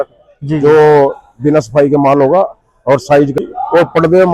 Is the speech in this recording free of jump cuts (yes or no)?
no